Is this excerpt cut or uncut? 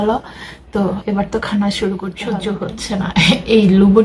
cut